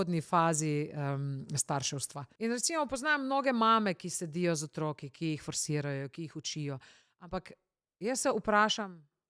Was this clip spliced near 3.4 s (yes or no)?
no